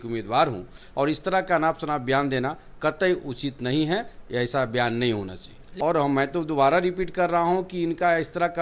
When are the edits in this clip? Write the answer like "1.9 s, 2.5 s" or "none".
5.6 s